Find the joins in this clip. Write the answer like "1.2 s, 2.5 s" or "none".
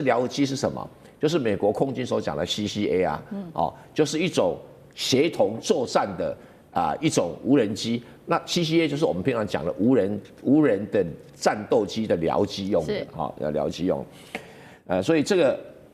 none